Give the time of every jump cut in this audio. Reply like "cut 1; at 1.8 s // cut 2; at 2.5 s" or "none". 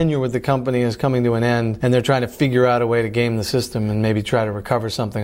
cut 1; at 1.7 s